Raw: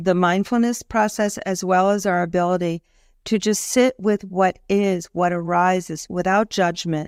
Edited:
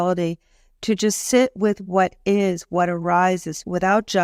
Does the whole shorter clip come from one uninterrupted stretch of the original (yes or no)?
yes